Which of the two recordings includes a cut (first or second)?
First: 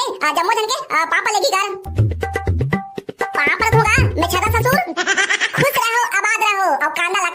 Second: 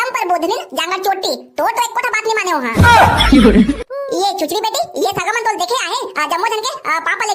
second